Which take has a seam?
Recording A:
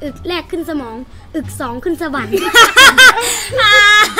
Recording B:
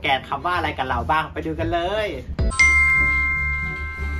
B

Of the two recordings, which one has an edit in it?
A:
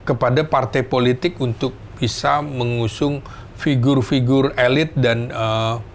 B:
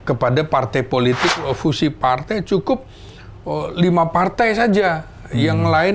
B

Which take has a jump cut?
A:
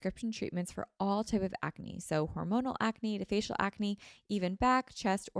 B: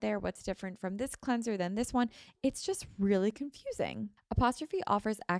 B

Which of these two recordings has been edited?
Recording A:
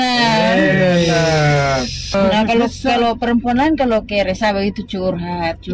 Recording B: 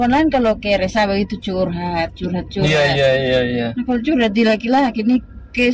A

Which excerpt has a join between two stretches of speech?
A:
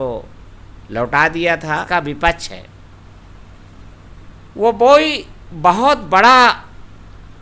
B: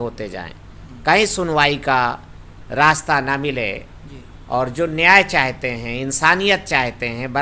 A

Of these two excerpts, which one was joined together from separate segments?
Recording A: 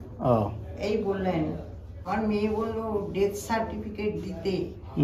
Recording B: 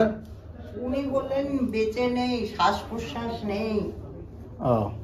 A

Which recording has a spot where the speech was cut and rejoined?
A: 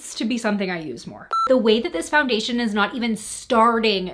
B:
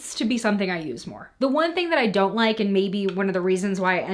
A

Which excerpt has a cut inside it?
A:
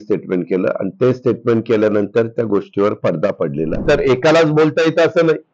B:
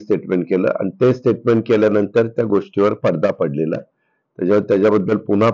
A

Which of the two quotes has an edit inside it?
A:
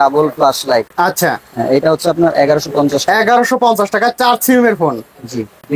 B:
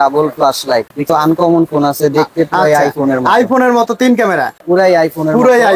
B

